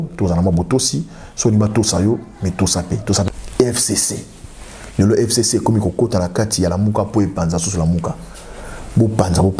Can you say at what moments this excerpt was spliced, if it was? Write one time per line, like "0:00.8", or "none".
0:03.3